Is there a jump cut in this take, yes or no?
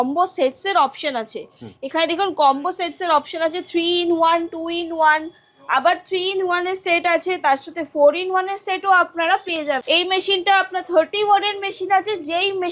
yes